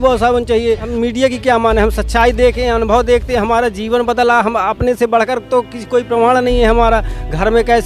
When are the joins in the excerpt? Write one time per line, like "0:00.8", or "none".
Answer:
0:00.9